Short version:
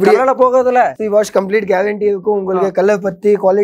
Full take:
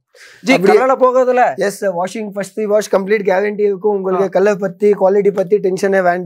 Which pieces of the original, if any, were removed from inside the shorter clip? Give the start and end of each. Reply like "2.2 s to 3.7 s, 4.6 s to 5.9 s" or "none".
1.6 s to 2.5 s